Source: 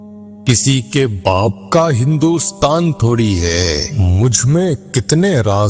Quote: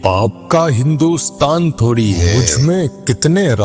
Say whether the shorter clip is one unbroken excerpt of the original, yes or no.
no